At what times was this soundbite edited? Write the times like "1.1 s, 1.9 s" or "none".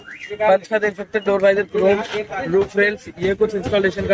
none